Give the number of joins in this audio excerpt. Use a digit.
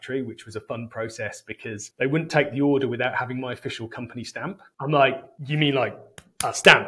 3